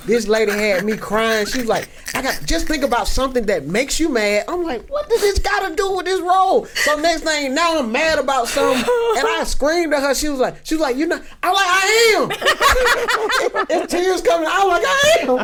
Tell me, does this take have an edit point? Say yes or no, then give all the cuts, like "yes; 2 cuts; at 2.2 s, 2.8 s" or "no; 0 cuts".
no; 0 cuts